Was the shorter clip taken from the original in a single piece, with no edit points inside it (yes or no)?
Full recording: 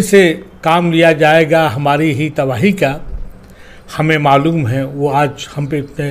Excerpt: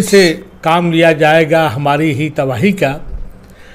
yes